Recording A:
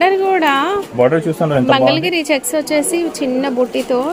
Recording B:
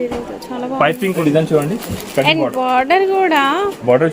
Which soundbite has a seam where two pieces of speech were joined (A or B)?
B